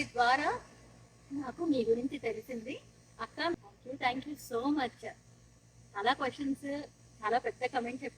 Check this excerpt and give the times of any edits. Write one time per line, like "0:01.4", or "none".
0:03.5